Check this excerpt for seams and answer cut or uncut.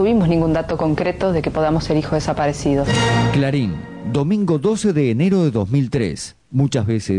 cut